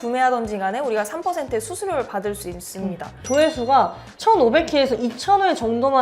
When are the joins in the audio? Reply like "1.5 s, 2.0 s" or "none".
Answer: 3.2 s